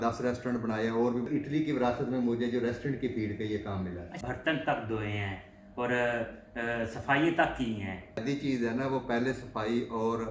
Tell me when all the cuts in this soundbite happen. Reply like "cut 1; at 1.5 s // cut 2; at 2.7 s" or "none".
cut 1; at 1.3 s // cut 2; at 4.1 s // cut 3; at 8.2 s